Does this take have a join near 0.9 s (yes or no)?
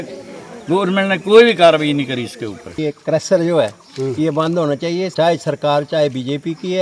no